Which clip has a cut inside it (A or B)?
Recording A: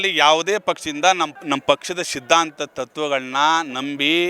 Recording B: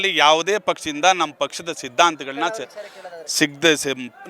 A